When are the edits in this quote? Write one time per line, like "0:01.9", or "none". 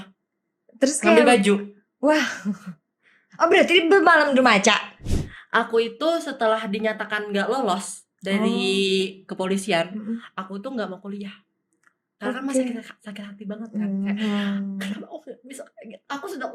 0:05.0